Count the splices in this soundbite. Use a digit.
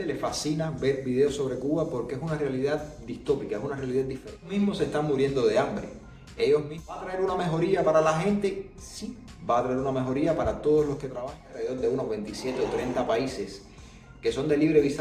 3